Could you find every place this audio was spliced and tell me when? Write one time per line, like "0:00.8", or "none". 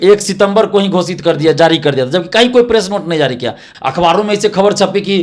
0:03.7

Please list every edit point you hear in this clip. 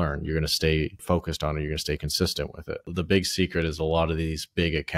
0:01.0
0:02.9

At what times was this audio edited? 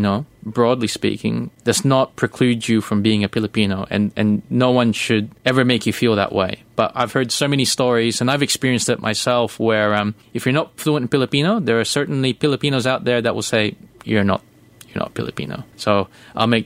0:01.5
0:05.3
0:10.2
0:15.6

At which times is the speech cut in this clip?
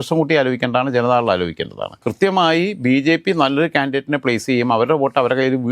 0:02.0

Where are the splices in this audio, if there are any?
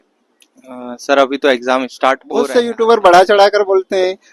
0:02.3

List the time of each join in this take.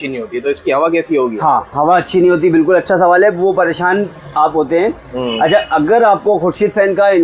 none

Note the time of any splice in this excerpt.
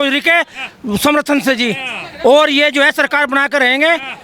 none

